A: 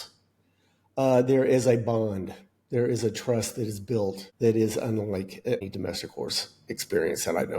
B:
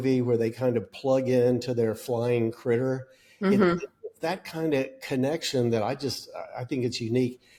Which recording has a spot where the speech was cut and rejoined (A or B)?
A